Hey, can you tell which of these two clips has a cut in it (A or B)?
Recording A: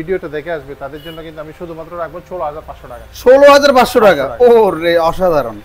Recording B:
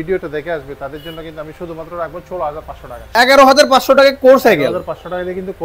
B